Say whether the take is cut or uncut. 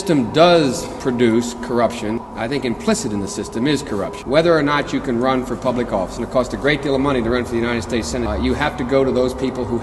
cut